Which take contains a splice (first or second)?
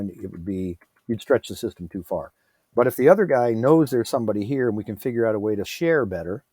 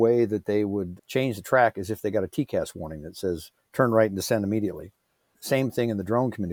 first